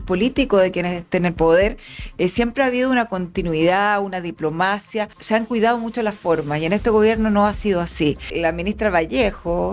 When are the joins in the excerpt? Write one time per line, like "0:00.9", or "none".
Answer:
0:05.2
0:08.3

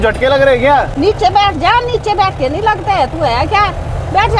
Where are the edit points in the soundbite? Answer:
0:00.9

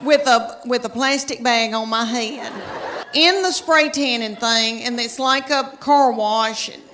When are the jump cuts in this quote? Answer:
0:03.1

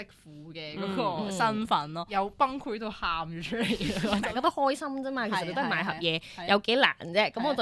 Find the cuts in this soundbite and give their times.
0:02.0
0:04.3

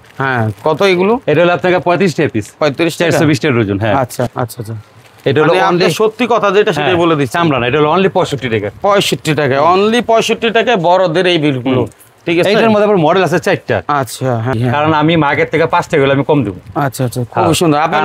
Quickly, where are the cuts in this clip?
0:04.3
0:14.5

